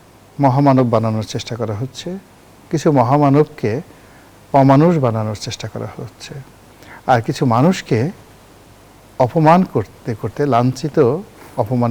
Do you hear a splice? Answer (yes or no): no